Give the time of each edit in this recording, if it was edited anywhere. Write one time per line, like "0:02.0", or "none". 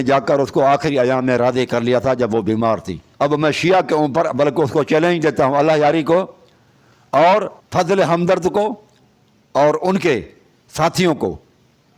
0:03.0